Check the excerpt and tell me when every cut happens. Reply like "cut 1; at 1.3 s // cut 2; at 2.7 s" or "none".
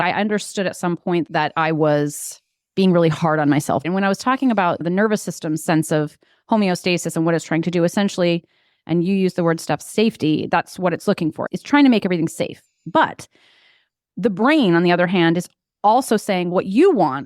cut 1; at 3.8 s // cut 2; at 4.8 s // cut 3; at 11.5 s